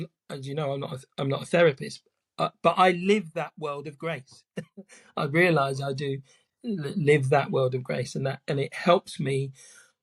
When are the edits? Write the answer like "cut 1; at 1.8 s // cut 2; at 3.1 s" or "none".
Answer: none